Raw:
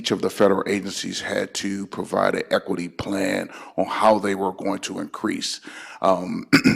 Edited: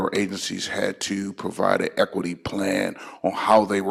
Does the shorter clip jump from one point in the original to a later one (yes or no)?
no